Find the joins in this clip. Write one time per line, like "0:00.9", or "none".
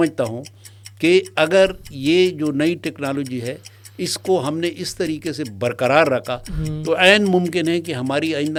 none